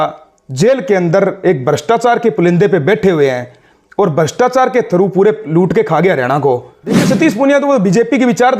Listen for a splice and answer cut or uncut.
cut